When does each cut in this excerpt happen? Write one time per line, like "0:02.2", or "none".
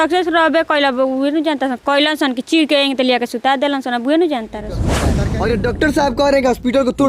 0:05.1